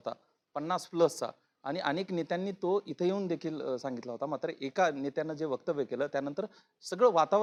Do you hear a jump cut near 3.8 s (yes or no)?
no